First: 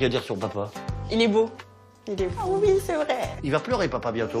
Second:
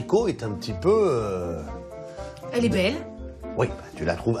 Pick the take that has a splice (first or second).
first